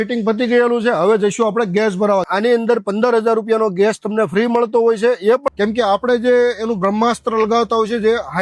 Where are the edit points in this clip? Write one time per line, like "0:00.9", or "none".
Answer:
0:02.3
0:05.5